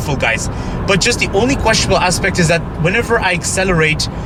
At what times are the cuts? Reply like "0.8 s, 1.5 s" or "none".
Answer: none